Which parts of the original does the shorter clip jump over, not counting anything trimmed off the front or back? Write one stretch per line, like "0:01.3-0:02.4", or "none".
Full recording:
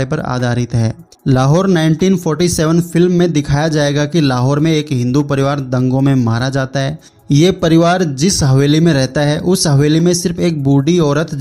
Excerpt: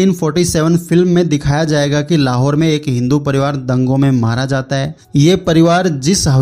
0:07.0-0:07.1